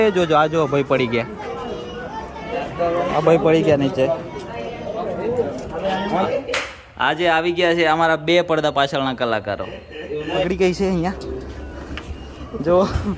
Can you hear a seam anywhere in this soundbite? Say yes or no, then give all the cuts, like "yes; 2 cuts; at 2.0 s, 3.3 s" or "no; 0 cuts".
yes; 3 cuts; at 2.5 s, 6.2 s, 9.9 s